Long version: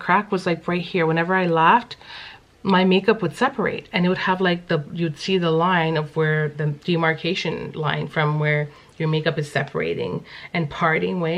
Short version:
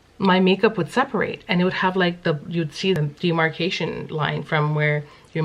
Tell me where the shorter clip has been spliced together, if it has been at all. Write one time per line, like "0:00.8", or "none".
0:03.0